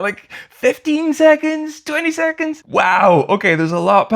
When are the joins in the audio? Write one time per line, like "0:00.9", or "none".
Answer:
0:02.6